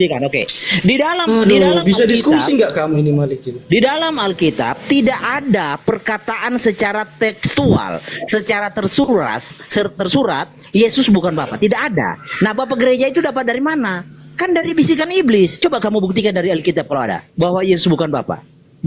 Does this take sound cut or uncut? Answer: cut